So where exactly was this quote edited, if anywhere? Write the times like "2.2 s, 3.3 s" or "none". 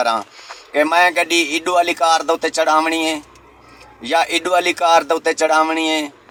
none